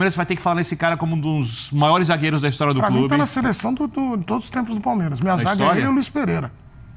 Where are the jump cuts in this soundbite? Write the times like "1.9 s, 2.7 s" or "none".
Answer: none

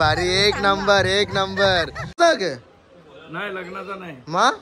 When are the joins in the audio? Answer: 2.2 s

